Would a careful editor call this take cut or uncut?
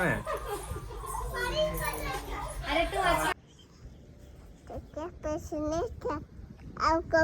cut